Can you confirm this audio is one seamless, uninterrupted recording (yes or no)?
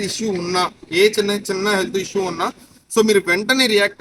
yes